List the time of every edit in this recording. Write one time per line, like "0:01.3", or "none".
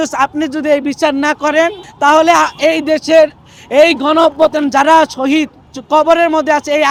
none